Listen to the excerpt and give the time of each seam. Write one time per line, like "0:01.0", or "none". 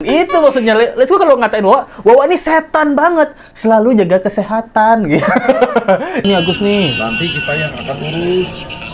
0:06.2